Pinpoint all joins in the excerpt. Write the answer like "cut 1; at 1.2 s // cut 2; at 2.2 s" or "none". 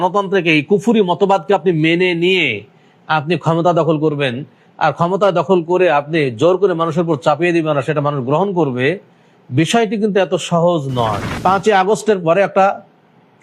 cut 1; at 11.3 s